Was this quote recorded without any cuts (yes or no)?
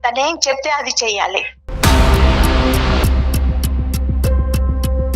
no